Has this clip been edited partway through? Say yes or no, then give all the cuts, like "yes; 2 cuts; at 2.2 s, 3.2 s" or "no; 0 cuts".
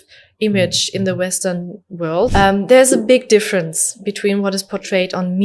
yes; 1 cut; at 2.3 s